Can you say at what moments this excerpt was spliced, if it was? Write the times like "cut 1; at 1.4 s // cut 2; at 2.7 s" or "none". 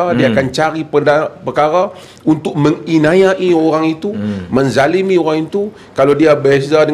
none